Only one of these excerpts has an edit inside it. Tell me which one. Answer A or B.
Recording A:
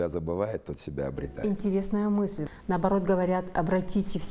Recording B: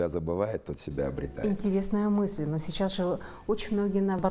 A